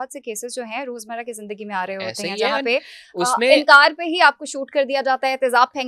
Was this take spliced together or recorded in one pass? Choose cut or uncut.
uncut